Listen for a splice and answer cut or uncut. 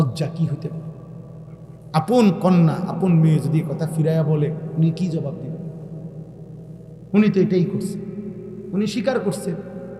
uncut